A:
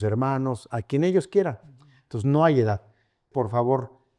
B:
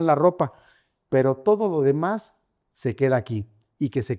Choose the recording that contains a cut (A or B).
A